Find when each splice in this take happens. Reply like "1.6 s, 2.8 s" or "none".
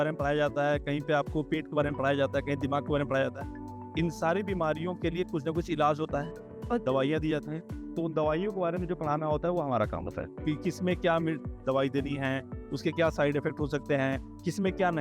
none